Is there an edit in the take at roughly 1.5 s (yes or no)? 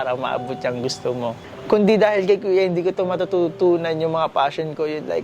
yes